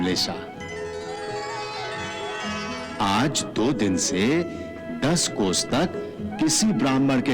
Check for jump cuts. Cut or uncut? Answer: uncut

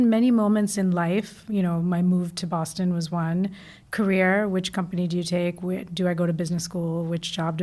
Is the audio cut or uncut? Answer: uncut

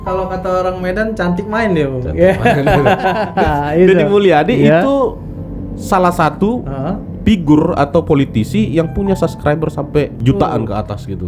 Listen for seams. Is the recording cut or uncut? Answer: cut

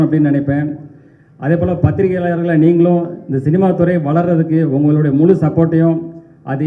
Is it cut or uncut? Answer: uncut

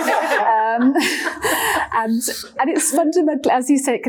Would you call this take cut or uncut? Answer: uncut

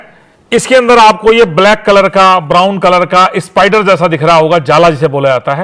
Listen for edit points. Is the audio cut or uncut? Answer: uncut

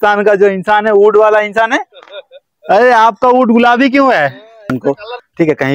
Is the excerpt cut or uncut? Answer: cut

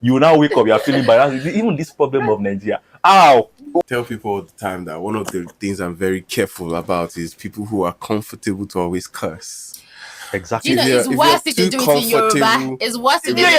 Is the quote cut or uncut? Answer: cut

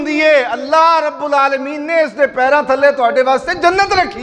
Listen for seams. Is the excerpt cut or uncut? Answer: uncut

